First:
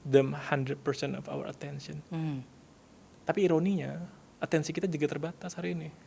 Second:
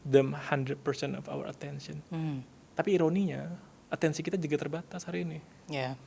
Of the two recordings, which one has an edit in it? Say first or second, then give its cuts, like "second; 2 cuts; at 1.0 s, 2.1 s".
second; 1 cut; at 2.6 s